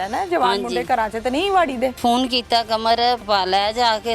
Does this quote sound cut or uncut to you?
cut